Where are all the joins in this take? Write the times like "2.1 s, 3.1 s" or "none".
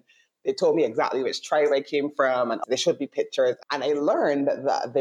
2.6 s, 3.6 s

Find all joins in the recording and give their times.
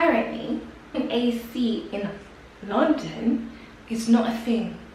1.0 s

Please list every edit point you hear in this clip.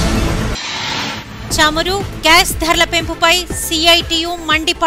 1.0 s

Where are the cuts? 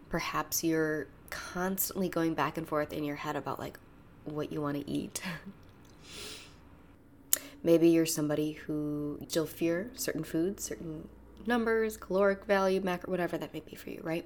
6.8 s, 9.3 s

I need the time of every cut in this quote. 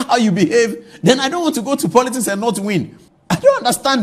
3.0 s

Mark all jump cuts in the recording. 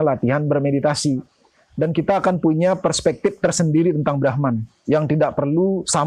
1.6 s

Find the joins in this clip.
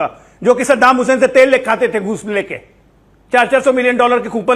3.0 s

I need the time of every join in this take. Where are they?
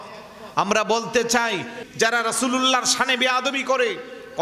1.8 s

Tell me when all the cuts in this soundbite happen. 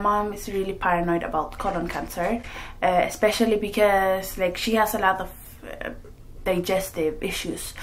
none

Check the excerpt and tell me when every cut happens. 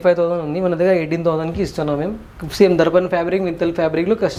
none

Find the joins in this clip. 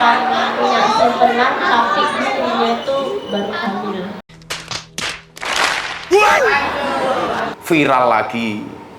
7.5 s

